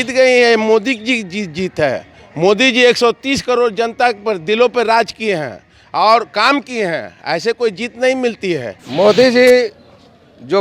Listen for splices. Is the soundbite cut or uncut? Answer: cut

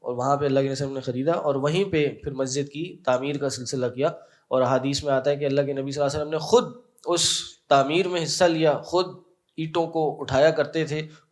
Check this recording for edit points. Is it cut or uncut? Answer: uncut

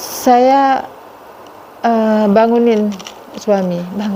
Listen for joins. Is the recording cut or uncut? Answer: uncut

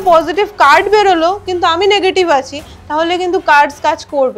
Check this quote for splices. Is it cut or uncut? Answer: uncut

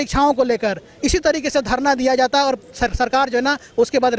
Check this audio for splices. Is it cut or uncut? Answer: uncut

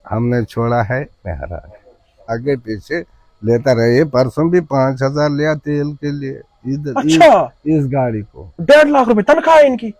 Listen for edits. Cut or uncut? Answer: cut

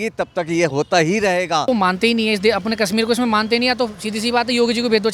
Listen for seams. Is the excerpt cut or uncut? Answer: cut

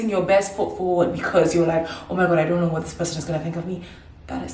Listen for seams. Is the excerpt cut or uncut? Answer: uncut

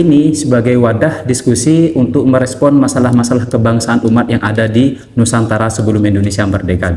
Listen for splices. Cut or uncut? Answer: uncut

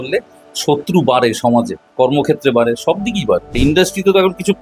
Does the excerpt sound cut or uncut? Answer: cut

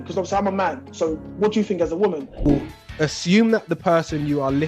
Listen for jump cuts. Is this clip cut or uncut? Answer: cut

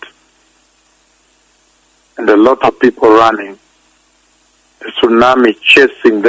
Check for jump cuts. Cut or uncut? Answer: uncut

